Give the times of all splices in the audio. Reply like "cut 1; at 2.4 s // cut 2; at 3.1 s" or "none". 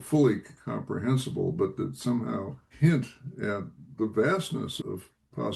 cut 1; at 2.6 s // cut 2; at 3.9 s // cut 3; at 4.7 s